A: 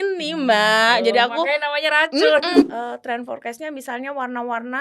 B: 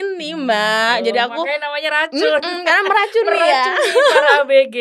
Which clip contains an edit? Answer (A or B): A